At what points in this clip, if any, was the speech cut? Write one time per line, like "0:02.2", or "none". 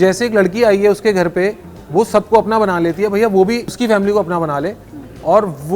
0:03.7